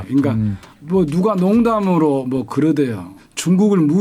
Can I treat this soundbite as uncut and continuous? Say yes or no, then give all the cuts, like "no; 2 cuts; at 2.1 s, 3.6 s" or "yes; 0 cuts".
yes; 0 cuts